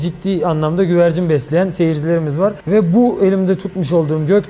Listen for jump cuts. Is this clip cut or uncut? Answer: uncut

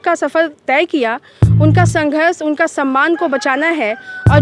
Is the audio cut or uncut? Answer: uncut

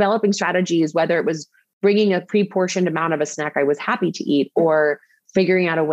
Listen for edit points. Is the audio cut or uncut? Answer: uncut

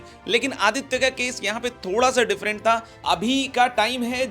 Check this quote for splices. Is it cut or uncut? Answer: cut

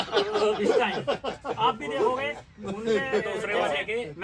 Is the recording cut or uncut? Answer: uncut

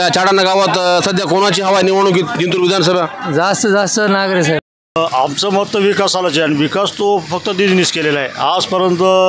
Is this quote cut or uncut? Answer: cut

